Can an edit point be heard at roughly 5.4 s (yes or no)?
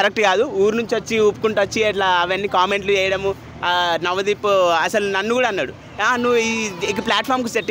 no